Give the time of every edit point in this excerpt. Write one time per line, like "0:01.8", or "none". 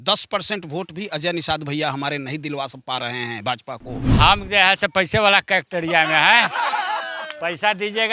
0:04.0